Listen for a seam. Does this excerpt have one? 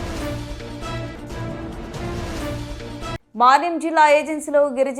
no; 0 cuts

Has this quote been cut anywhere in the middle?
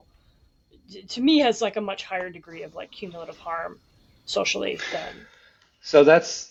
no; 0 cuts

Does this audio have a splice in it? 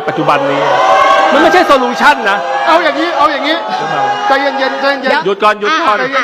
no; 0 cuts

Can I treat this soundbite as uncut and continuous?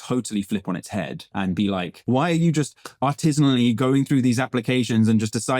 no; 2 cuts; at 1.2 s, 2.0 s

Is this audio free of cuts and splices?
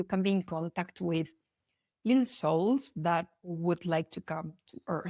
yes; 0 cuts

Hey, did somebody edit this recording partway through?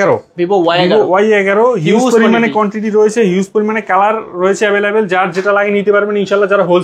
no; 0 cuts

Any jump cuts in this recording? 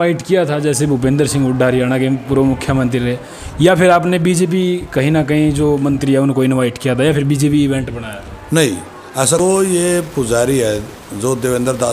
yes; 1 cut; at 9.4 s

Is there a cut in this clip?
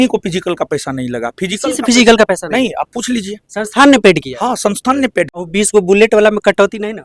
yes; 1 cut; at 5.3 s

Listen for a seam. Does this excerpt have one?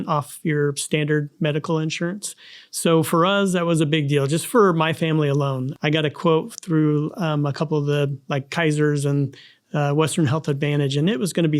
no; 0 cuts

